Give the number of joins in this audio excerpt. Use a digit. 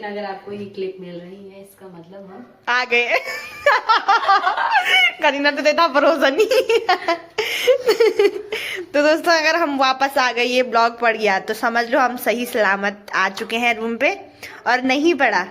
0